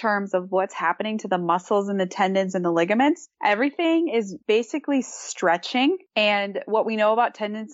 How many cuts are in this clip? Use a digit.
3